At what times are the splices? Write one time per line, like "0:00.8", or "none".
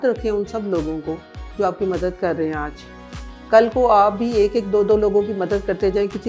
none